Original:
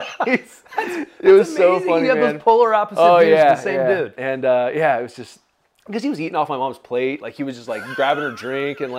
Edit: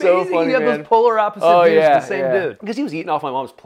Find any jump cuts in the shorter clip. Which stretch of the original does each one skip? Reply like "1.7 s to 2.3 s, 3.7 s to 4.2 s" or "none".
4.1 s to 5.8 s